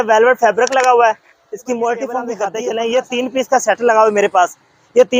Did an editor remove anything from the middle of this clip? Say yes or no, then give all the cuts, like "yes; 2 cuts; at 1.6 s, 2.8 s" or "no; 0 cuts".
yes; 1 cut; at 2.4 s